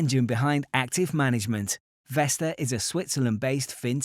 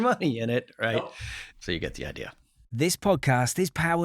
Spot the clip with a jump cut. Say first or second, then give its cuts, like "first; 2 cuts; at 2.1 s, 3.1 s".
second; 2 cuts; at 0.9 s, 2.5 s